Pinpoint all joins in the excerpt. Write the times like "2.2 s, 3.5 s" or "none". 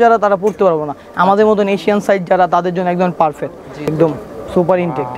3.9 s